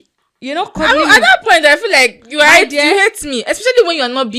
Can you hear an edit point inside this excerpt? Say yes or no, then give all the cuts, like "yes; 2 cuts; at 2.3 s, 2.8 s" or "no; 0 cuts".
no; 0 cuts